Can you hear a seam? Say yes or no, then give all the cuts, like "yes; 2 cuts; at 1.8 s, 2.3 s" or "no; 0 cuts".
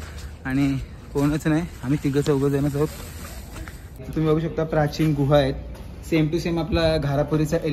yes; 1 cut; at 4.1 s